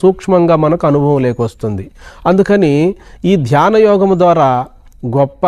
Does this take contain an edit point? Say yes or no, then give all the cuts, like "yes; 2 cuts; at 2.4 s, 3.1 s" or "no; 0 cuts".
no; 0 cuts